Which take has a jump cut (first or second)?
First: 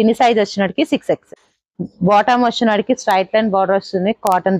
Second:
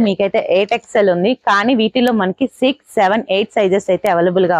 first